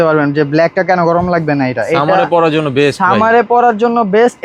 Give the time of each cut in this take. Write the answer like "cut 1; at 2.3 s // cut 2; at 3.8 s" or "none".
none